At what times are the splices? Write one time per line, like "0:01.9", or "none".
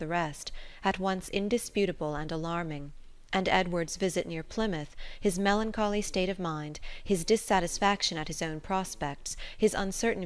none